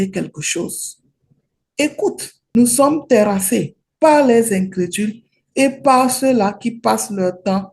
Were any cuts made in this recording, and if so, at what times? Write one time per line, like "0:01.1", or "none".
0:02.3